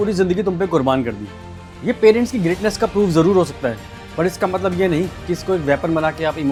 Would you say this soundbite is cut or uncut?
uncut